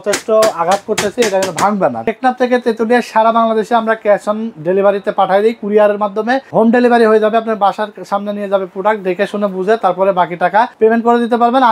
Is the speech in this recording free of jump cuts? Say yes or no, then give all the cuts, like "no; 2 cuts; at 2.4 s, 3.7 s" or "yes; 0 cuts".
no; 3 cuts; at 2.1 s, 6.4 s, 10.7 s